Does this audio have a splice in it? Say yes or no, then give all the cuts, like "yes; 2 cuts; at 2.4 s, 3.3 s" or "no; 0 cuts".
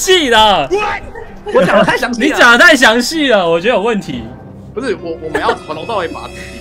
no; 0 cuts